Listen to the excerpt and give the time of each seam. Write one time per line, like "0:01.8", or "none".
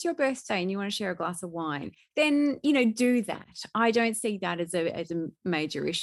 none